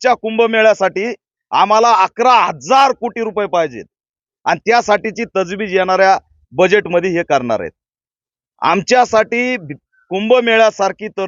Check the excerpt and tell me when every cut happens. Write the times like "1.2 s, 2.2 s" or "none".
none